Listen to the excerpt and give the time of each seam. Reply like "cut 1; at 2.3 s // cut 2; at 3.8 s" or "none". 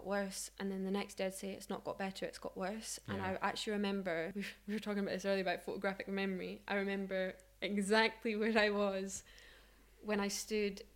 cut 1; at 4.4 s